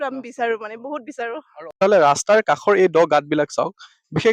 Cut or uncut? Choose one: cut